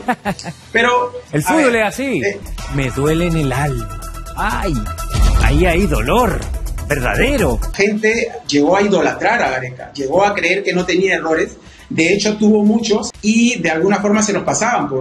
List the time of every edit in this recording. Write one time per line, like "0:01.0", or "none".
0:02.4
0:07.7
0:13.1